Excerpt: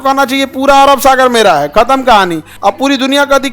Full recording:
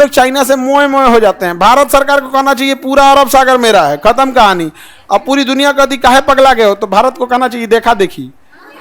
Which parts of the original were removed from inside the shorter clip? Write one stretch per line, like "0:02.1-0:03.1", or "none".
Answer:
0:04.7-0:04.9